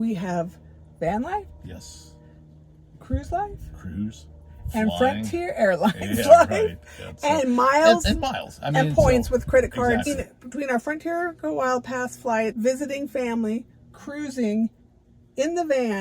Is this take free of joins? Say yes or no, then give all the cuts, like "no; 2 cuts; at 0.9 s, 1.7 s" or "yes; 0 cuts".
no; 2 cuts; at 10.1 s, 12.5 s